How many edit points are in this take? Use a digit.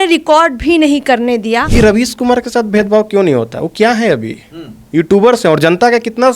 1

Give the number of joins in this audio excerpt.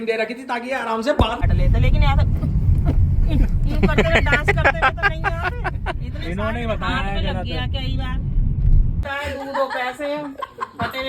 2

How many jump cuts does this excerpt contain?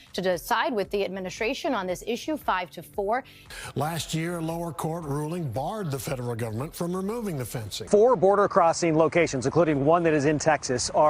2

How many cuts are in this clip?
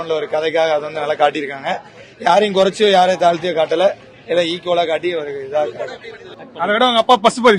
1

